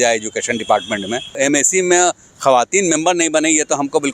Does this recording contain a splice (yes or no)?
yes